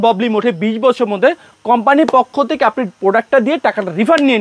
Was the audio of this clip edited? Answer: no; 0 cuts

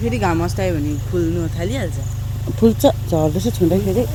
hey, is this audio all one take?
yes; 0 cuts

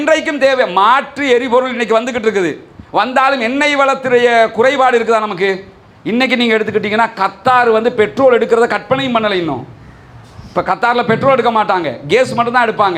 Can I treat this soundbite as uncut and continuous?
yes; 0 cuts

